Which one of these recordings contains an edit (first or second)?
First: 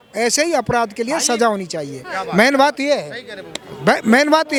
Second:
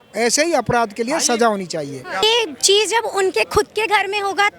second